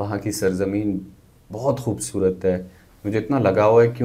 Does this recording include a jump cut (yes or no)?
no